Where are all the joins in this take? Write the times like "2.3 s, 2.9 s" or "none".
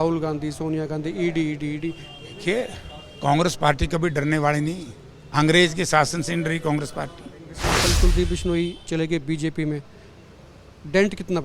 7.8 s